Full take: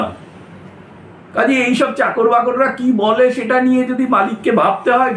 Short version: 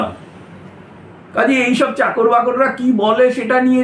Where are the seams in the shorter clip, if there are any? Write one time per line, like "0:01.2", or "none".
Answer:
none